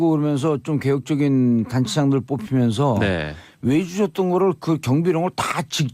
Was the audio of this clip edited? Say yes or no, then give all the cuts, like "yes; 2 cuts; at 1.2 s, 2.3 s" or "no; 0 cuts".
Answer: yes; 1 cut; at 2.4 s